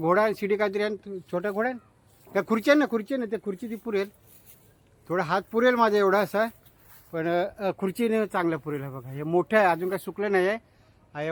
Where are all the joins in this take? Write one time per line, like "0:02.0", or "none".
none